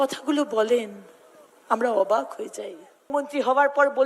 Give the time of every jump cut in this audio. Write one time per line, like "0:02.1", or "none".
0:03.1